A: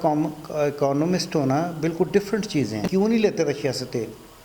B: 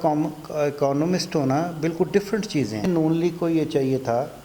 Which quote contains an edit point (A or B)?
A